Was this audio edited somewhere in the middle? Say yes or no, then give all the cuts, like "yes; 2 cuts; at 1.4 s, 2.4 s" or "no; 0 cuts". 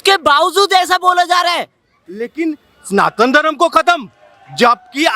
yes; 1 cut; at 2.0 s